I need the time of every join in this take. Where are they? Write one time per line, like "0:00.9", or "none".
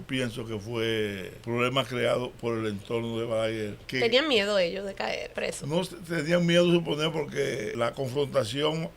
0:01.3
0:03.8
0:05.3
0:07.7